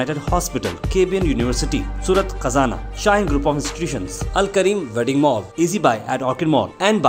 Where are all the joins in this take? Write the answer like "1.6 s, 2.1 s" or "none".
none